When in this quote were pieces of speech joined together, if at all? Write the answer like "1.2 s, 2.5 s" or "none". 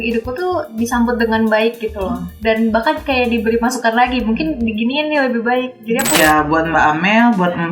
6.2 s